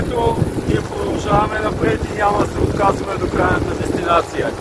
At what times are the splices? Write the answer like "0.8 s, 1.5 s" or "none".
none